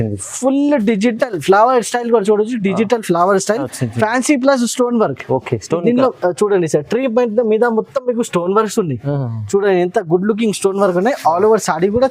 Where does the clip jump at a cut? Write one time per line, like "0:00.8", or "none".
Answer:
0:03.7